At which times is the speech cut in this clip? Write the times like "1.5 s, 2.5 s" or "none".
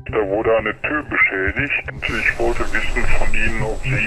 1.9 s